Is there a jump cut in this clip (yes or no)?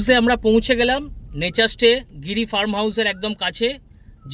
no